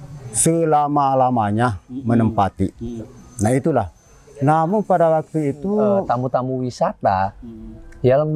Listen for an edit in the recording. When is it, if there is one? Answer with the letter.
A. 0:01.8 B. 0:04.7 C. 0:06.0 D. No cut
C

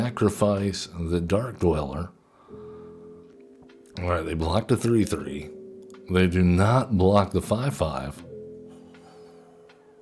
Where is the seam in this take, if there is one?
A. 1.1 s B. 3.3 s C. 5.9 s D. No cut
B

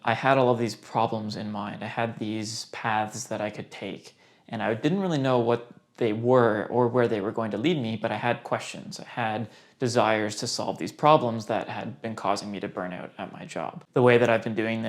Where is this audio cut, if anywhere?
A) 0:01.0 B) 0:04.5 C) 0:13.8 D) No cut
C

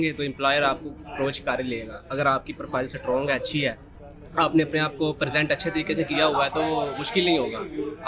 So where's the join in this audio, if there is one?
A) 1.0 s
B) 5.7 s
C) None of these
C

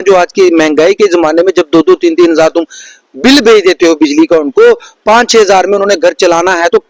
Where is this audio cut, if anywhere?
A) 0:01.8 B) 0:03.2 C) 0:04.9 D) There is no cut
D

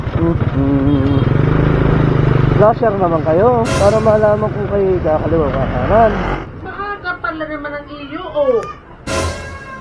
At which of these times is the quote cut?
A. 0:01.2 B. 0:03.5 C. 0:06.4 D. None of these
C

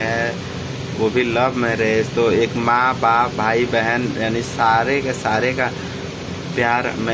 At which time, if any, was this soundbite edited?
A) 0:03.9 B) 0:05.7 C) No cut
C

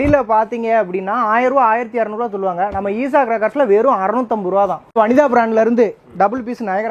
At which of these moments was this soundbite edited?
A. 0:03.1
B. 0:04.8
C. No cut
C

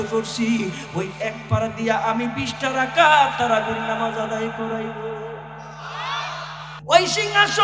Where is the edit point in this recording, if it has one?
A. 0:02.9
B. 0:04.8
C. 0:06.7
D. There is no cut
C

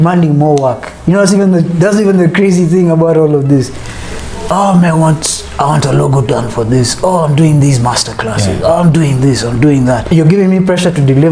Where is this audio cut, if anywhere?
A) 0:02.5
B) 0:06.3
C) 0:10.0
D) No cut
C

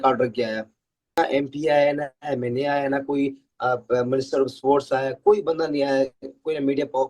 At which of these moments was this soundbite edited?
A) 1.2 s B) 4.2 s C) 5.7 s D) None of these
A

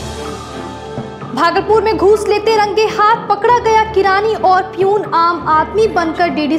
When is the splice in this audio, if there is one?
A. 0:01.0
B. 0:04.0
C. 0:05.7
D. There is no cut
A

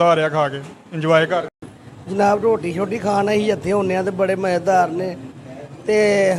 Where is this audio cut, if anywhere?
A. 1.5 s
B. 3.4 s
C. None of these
C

